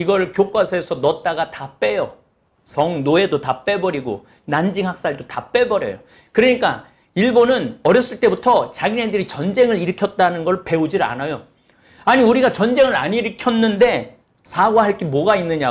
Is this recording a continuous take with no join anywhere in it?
yes; 0 cuts

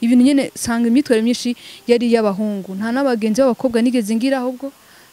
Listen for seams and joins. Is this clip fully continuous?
yes; 0 cuts

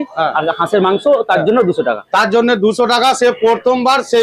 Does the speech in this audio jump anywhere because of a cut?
no; 0 cuts

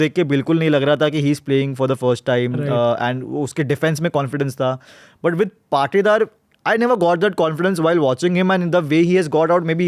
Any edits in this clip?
no; 0 cuts

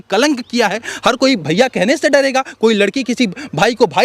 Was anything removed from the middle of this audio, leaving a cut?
yes; 1 cut; at 0.9 s

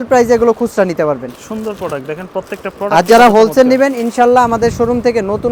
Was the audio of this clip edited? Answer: no; 0 cuts

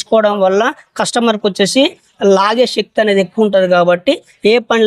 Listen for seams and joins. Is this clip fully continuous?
yes; 0 cuts

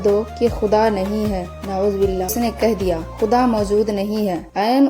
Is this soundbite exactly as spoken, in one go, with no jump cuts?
no; 1 cut; at 2.3 s

